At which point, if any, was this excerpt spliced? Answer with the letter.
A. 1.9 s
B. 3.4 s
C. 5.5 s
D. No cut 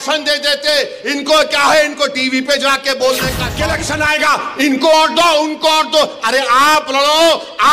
B